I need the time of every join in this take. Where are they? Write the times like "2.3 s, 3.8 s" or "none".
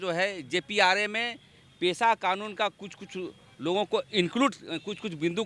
none